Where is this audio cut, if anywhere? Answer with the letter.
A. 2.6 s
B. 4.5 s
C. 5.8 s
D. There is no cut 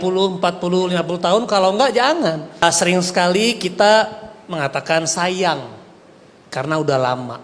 A